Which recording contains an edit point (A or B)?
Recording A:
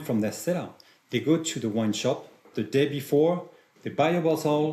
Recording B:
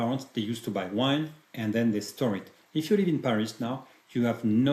A